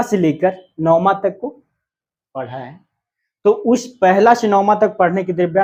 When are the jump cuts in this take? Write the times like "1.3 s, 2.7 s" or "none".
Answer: none